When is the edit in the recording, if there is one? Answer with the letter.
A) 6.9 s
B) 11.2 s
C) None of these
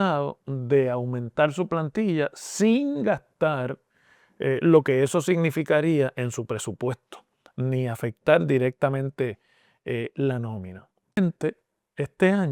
B